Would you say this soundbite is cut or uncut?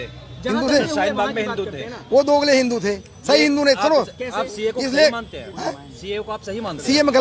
uncut